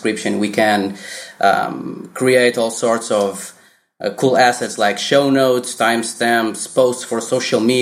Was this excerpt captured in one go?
yes; 0 cuts

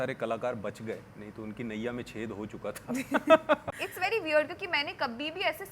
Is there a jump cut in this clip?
yes; 1 cut; at 3.8 s

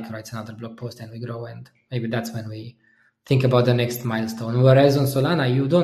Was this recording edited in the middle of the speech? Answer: no; 0 cuts

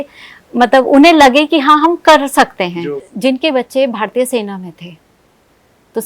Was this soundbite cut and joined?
yes; 1 cut; at 3.0 s

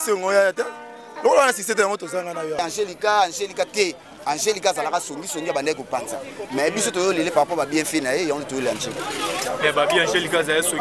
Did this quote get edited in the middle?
yes; 1 cut; at 2.6 s

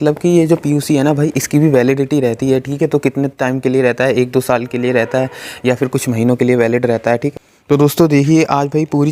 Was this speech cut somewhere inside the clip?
yes; 1 cut; at 7.5 s

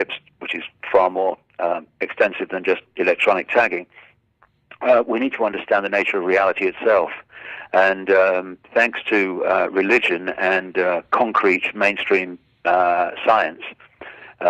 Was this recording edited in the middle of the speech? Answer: no; 0 cuts

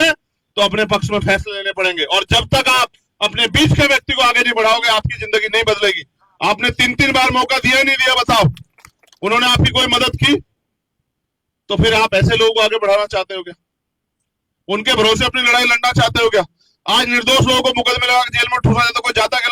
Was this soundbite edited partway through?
no; 0 cuts

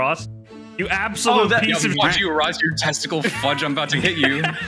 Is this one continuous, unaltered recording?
yes; 0 cuts

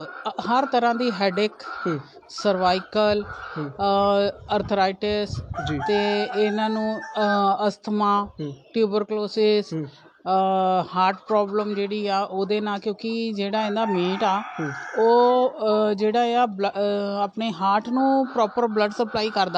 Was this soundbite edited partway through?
no; 0 cuts

